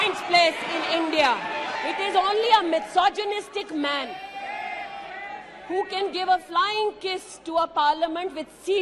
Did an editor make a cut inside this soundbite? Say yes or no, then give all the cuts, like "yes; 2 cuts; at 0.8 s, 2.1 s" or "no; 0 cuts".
yes; 1 cut; at 1.8 s